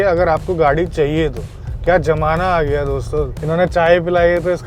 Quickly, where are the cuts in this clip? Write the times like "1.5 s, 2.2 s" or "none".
3.4 s